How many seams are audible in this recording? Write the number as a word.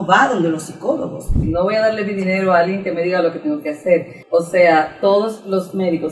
two